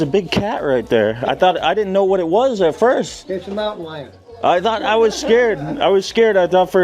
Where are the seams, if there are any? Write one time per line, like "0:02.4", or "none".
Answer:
none